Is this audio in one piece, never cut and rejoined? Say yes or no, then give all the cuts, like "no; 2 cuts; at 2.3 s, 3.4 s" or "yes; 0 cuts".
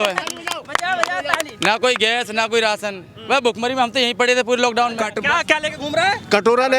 no; 1 cut; at 5.1 s